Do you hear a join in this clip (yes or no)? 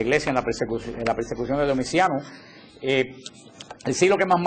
no